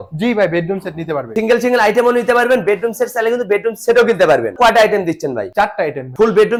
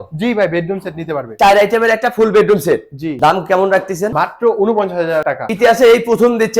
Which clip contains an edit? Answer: second; 2 cuts; at 1.3 s, 5.5 s

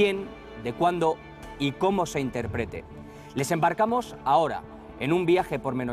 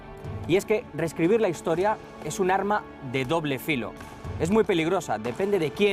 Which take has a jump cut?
first; 1 cut; at 1.5 s

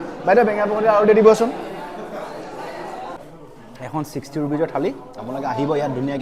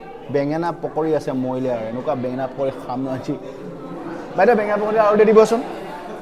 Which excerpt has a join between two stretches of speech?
first; 1 cut; at 3.2 s

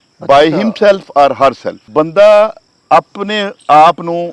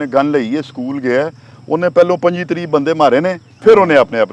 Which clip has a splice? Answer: first; 2 cuts; at 1.9 s, 2.7 s

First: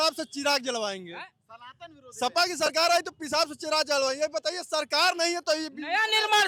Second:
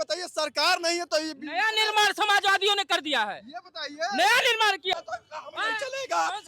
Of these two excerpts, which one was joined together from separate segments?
second; 1 cut; at 4.9 s

